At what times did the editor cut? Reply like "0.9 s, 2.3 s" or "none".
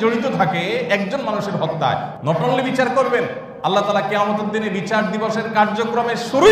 2.1 s, 3.4 s